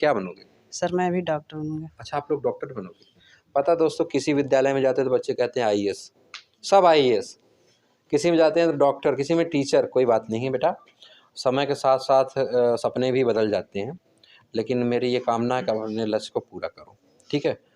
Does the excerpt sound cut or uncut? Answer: uncut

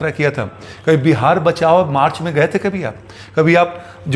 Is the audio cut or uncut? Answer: uncut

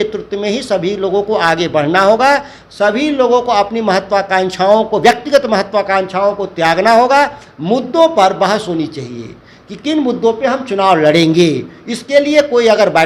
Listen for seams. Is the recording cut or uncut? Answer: uncut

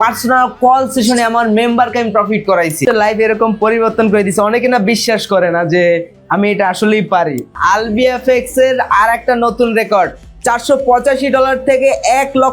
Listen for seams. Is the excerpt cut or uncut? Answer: cut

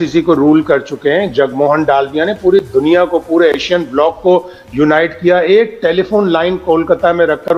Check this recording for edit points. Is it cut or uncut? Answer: uncut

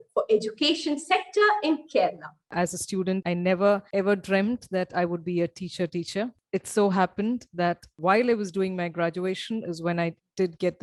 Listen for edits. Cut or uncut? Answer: cut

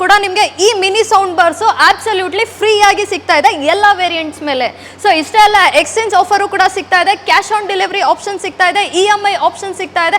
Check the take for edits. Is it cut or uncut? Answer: uncut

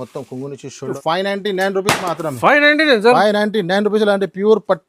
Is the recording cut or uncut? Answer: cut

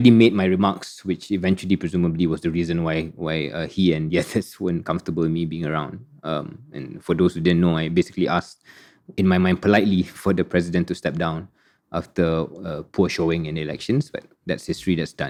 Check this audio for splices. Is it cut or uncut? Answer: uncut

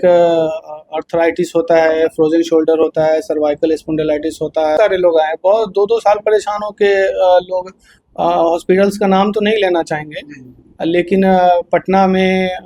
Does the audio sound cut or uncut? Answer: cut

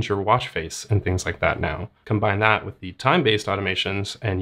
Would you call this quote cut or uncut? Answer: cut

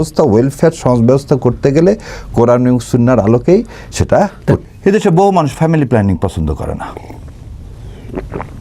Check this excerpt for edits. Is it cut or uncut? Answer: cut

